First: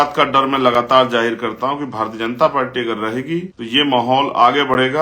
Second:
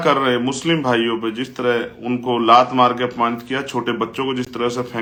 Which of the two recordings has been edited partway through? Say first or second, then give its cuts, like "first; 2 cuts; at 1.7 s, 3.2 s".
first; 1 cut; at 3.6 s